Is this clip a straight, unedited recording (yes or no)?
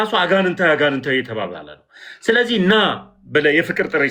yes